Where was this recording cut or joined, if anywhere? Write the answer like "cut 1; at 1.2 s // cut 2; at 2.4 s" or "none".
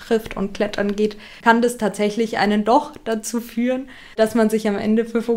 cut 1; at 1.3 s // cut 2; at 4.2 s